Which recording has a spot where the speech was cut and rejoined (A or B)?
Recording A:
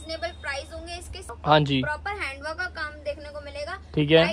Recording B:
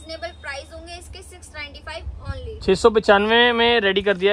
A